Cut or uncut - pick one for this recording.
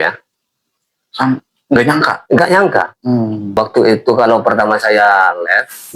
cut